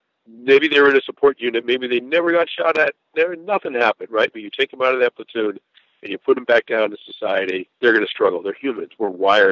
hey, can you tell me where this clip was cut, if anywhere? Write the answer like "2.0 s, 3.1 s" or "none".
7.7 s